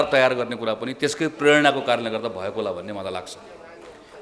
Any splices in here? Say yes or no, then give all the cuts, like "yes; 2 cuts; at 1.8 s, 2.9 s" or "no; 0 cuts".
no; 0 cuts